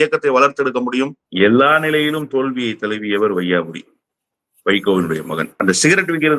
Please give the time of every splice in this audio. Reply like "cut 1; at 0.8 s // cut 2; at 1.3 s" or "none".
cut 1; at 1.2 s // cut 2; at 5.5 s